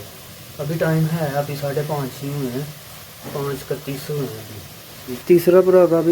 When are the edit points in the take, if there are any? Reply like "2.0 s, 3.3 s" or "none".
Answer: 5.2 s